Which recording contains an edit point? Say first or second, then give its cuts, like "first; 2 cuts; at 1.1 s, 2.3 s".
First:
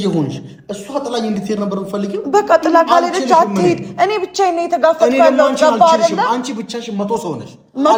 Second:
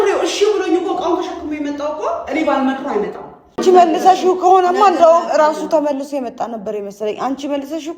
second; 1 cut; at 3.6 s